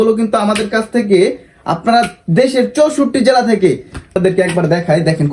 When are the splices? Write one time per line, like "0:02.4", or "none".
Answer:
0:04.2